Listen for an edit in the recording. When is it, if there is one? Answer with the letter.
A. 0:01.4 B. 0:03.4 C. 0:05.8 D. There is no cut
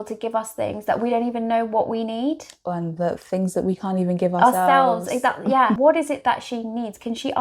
C